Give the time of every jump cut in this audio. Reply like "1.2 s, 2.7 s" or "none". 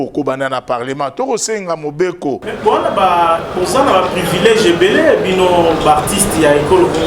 2.5 s